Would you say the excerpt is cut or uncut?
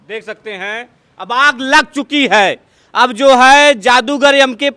uncut